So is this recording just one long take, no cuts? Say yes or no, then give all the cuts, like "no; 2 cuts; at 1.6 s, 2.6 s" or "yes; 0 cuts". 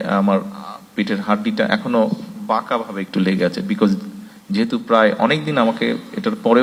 yes; 0 cuts